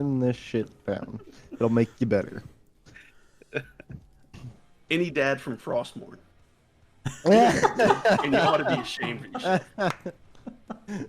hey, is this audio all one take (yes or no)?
no